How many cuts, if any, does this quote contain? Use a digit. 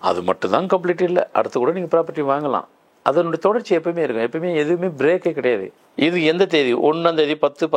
1